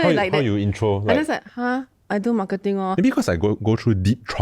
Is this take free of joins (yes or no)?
no